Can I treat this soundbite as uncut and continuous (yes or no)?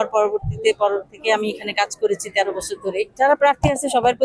no